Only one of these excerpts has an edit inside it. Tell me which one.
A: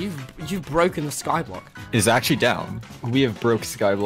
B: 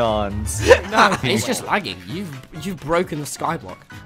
B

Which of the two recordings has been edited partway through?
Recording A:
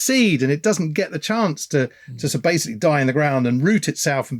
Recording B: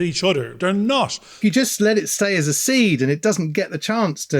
B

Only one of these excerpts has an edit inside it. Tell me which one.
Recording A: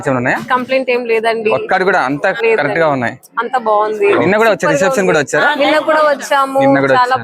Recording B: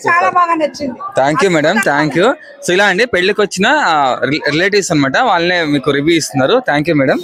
A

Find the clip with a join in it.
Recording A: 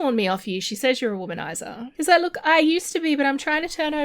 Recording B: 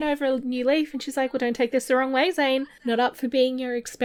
A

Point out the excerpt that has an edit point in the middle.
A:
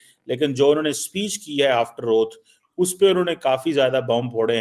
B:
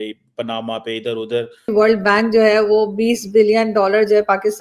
B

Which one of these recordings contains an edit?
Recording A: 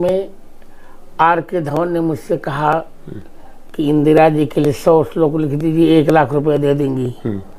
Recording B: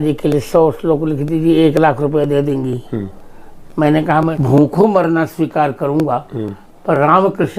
B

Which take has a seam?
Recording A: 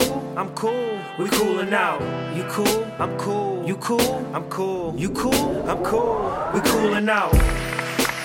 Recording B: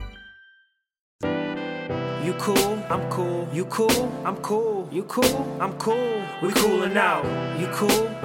B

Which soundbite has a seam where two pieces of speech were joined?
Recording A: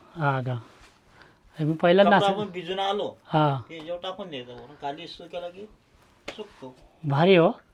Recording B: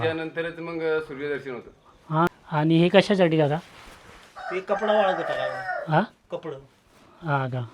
B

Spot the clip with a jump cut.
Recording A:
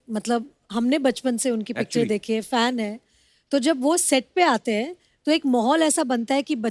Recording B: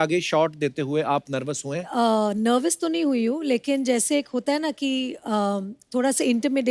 B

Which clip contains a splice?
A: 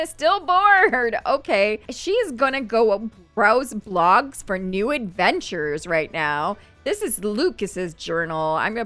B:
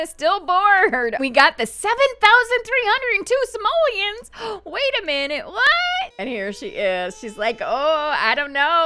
B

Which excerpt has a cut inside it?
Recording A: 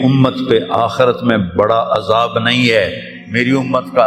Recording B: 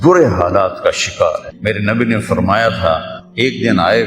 B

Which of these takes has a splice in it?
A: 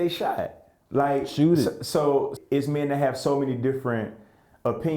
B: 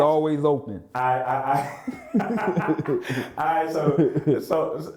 A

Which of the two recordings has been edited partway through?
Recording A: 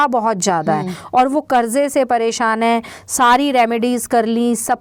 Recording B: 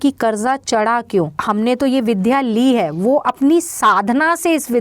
B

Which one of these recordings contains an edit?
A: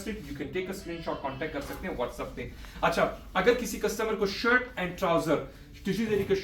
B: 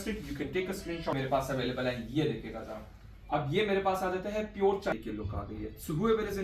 B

